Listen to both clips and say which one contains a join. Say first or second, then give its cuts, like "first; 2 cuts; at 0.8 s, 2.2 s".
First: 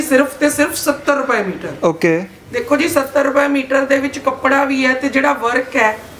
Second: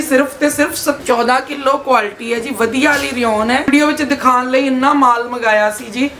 second; 2 cuts; at 1.0 s, 3.7 s